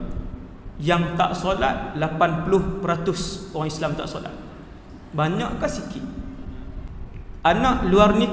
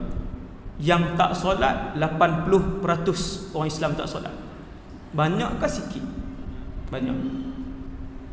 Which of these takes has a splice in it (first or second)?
first